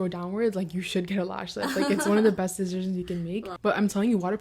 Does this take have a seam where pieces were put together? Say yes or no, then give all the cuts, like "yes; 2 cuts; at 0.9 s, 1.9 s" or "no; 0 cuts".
yes; 1 cut; at 3.5 s